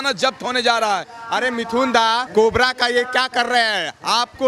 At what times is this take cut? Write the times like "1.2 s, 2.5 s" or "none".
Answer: 1.1 s, 2.3 s